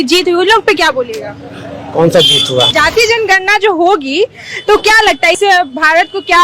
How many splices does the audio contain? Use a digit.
1